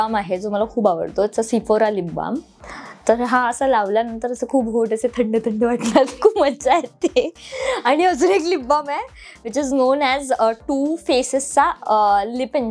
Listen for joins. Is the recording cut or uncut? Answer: uncut